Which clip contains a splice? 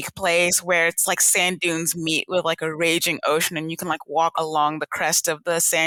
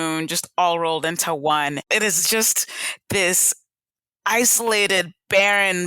second; 1 cut; at 1.9 s

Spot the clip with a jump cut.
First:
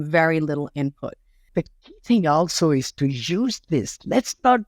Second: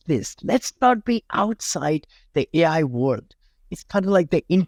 first; 1 cut; at 1.4 s

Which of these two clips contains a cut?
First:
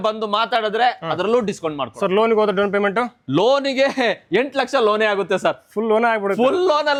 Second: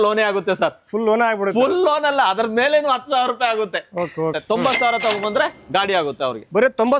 second; 2 cuts; at 4.4 s, 5.6 s

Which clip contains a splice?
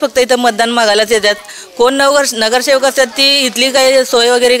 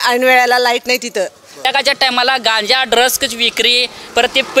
second; 1 cut; at 1.6 s

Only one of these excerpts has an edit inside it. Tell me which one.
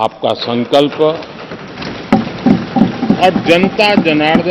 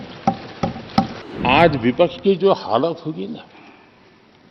second; 1 cut; at 1.2 s

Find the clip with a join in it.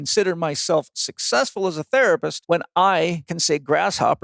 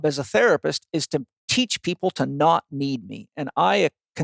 first; 2 cuts; at 2.3 s, 3.3 s

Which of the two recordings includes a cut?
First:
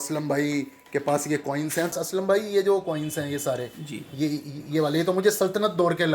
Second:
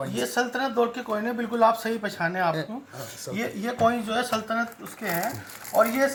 first; 1 cut; at 1.9 s

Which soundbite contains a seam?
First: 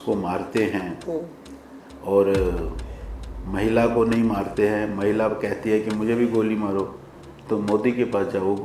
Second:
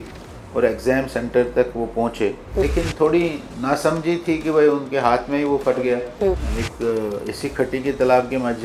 second; 2 cuts; at 2.6 s, 6.5 s

